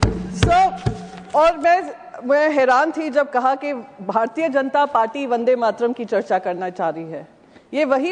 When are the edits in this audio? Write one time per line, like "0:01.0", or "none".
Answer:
none